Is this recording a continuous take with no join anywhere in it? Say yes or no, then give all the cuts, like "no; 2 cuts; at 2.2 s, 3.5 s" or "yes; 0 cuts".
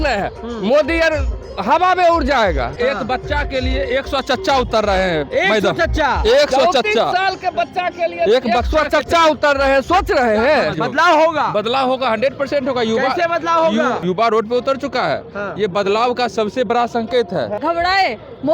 no; 4 cuts; at 2.8 s, 10.7 s, 14.0 s, 17.6 s